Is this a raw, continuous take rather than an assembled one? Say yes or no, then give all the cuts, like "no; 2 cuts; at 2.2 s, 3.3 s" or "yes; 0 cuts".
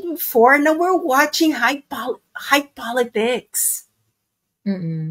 yes; 0 cuts